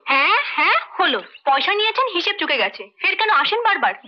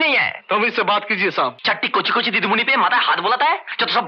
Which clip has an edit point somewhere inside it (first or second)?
second